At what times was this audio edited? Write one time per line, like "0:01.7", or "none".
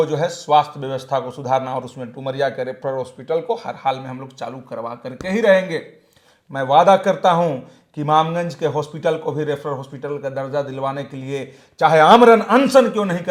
none